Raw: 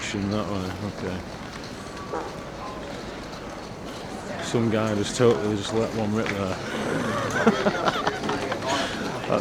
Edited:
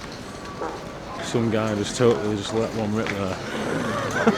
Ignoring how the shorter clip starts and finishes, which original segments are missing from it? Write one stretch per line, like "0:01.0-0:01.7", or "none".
0:02.7-0:04.4